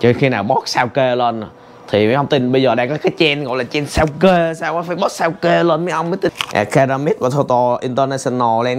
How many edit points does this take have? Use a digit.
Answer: 1